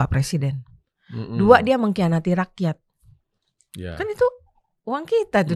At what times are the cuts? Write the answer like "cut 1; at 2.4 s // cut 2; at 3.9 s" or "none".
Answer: none